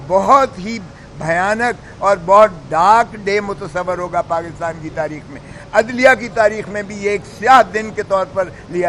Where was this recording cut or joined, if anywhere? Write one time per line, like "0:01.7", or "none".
none